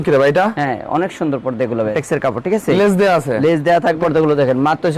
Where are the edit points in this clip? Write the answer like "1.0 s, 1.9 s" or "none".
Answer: 1.9 s, 4.0 s